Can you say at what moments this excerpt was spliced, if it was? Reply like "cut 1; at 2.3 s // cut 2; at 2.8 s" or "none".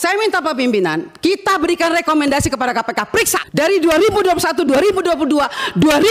cut 1; at 3.4 s